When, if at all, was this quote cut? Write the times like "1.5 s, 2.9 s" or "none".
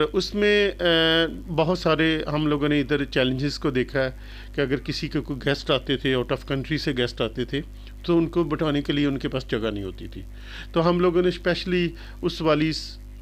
none